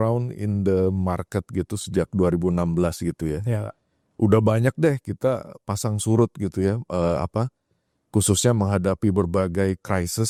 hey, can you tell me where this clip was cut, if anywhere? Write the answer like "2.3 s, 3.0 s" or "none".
none